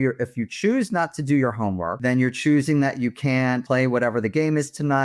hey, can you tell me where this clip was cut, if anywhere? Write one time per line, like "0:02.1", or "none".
0:01.9
0:03.6